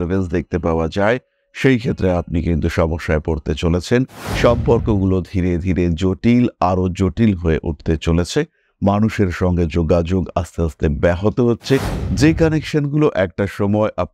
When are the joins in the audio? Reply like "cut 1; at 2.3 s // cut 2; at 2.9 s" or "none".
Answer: none

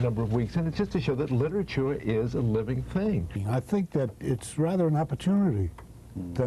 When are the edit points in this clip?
cut 1; at 3.4 s

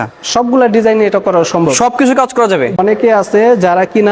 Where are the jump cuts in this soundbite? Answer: cut 1; at 2.8 s

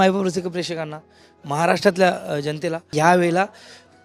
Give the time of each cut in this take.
cut 1; at 2.9 s

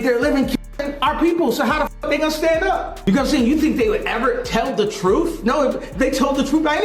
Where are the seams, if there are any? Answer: cut 1; at 3.0 s

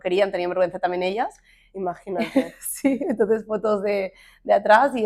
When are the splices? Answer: none

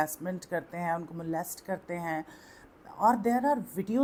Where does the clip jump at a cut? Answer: none

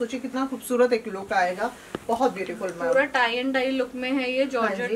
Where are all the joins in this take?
none

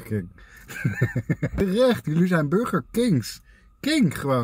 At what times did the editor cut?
cut 1; at 1.6 s

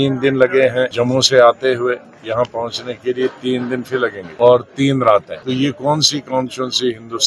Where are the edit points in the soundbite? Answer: cut 1; at 0.9 s // cut 2; at 4.2 s // cut 3; at 5.3 s

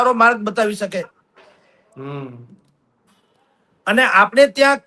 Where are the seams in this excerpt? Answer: none

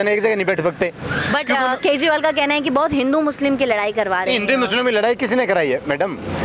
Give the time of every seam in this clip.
none

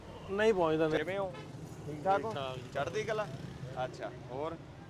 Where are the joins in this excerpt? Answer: cut 1; at 1.0 s

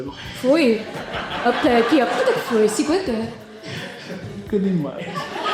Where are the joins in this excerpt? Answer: none

